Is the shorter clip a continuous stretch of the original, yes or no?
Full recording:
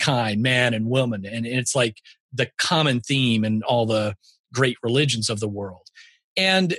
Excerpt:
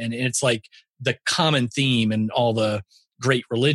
yes